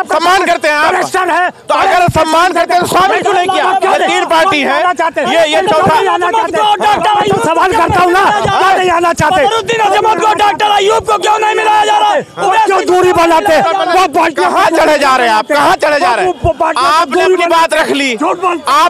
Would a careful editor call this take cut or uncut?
uncut